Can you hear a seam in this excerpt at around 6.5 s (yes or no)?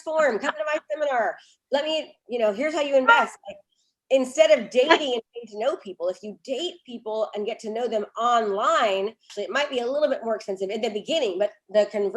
no